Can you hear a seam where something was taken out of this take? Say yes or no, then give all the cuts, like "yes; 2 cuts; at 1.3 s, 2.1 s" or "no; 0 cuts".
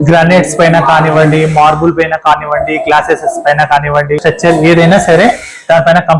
yes; 1 cut; at 4.2 s